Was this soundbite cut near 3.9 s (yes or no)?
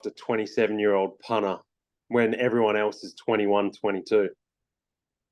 no